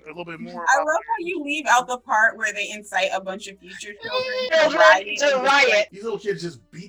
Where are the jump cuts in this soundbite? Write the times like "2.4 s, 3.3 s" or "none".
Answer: 5.9 s